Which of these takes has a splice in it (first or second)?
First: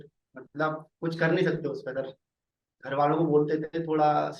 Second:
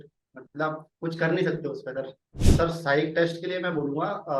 second